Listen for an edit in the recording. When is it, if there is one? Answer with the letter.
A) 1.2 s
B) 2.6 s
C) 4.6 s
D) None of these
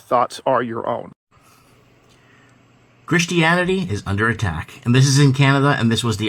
A